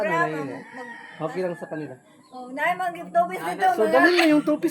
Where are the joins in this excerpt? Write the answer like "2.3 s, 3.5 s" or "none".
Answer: none